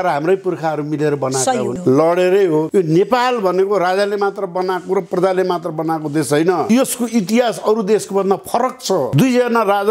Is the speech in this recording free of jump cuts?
no; 4 cuts; at 1.8 s, 2.7 s, 6.6 s, 9.1 s

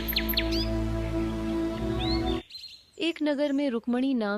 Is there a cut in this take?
yes; 1 cut; at 2.3 s

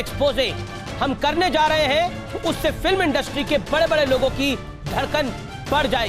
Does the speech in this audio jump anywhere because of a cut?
no; 0 cuts

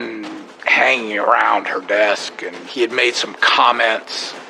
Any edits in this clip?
no; 0 cuts

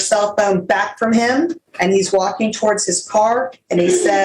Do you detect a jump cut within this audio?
yes; 1 cut; at 1.6 s

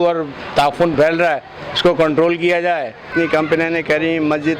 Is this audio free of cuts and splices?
no; 1 cut; at 3.1 s

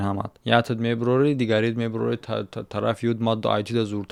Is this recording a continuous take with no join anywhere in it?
yes; 0 cuts

